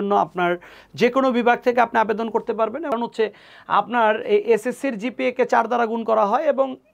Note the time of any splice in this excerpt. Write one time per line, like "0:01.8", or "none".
0:02.9